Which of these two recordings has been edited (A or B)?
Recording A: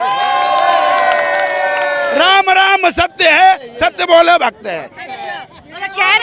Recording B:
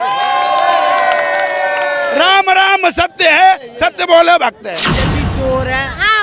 B